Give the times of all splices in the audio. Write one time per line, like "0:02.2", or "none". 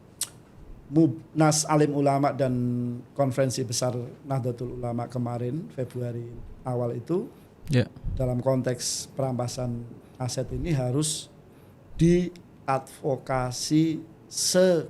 none